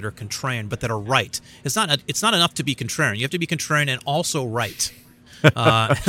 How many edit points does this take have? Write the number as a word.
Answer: zero